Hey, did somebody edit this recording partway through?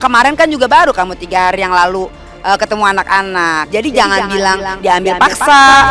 yes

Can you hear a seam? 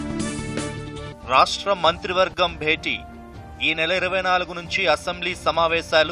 no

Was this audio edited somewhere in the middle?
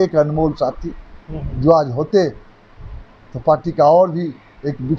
no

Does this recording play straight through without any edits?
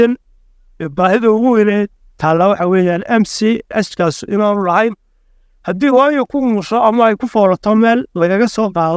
yes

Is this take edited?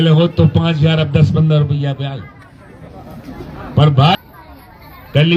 yes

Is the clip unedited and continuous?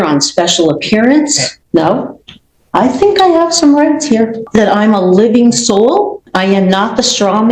no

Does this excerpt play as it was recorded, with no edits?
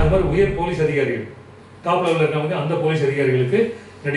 yes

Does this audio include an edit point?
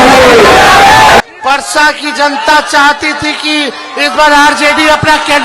yes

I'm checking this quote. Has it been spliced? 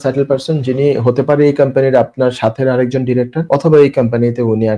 yes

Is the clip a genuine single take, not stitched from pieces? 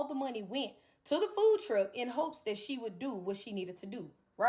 yes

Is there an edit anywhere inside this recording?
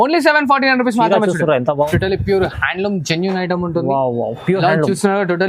yes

